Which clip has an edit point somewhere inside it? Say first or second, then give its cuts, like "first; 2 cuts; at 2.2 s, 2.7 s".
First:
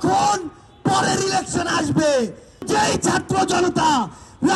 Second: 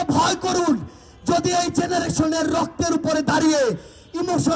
first; 1 cut; at 2.7 s